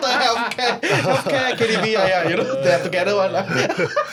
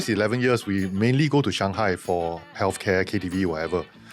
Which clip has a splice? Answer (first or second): second